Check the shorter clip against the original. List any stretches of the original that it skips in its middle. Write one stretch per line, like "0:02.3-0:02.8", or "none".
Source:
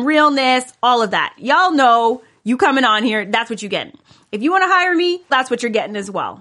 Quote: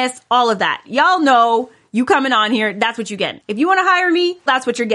0:03.9-0:04.2